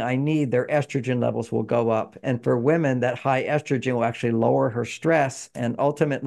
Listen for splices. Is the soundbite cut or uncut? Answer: uncut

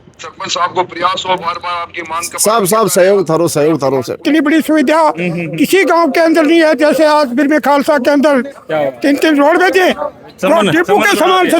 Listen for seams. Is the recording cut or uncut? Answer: cut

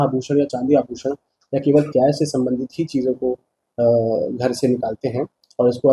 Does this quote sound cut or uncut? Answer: uncut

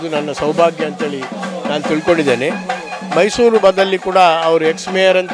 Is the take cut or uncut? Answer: uncut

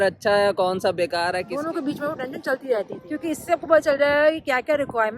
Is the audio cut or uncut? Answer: cut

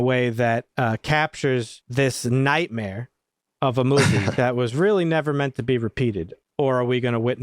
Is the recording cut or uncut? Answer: cut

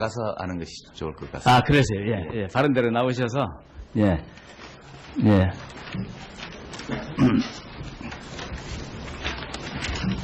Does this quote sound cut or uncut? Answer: uncut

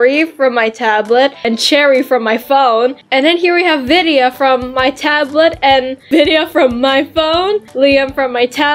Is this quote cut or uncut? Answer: uncut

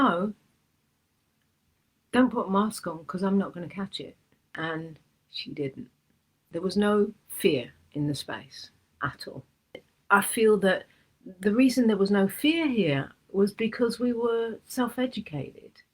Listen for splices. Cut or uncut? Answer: cut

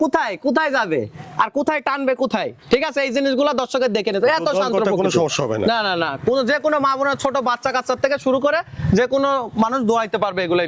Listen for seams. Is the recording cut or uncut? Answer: uncut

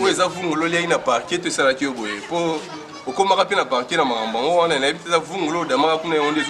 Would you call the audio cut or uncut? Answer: uncut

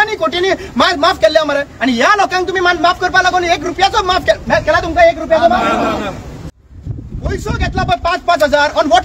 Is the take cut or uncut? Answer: cut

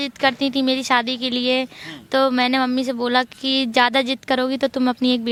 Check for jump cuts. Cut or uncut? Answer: uncut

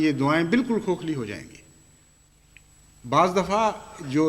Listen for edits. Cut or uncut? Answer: cut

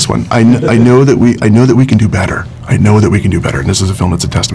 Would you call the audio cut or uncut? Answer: uncut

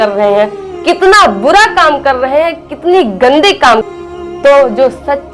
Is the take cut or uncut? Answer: cut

